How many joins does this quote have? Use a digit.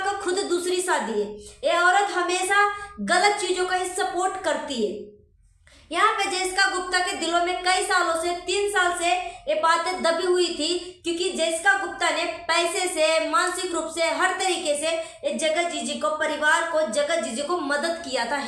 0